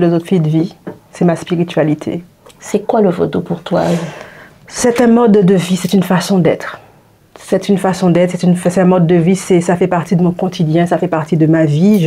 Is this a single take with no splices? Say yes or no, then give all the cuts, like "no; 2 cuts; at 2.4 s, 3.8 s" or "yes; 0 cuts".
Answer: yes; 0 cuts